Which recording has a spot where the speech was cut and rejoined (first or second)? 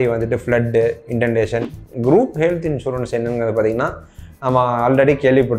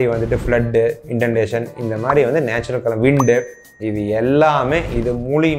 first